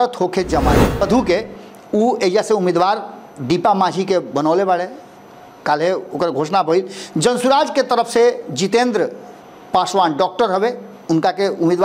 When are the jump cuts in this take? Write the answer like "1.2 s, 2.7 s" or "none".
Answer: 1.0 s